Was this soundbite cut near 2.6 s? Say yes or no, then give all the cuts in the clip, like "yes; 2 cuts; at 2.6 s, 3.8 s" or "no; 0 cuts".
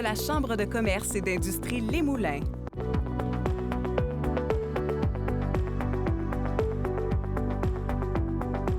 yes; 1 cut; at 2.6 s